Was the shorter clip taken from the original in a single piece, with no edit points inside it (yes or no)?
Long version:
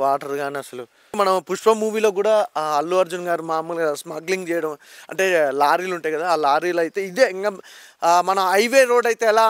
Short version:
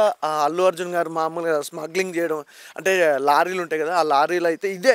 yes